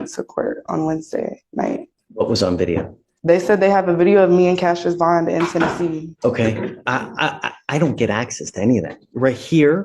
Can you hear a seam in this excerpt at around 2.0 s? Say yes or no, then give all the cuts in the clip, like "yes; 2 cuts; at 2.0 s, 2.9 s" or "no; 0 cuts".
yes; 2 cuts; at 2.0 s, 6.1 s